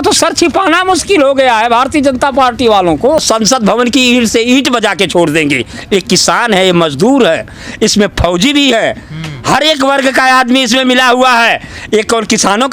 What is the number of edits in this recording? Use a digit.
1